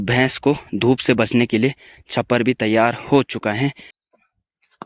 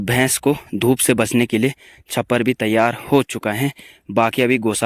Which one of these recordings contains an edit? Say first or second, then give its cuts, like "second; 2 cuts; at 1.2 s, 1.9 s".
first; 1 cut; at 3.9 s